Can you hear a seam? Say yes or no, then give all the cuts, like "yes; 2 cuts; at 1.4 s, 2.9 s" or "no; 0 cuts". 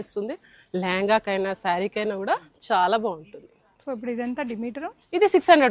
no; 0 cuts